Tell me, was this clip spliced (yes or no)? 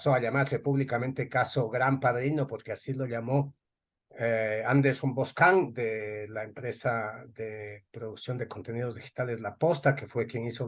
no